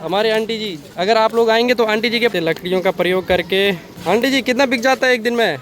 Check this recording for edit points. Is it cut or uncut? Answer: cut